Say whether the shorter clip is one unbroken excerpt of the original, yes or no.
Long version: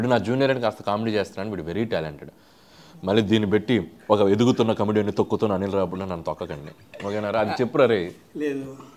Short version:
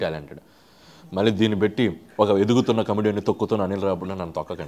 yes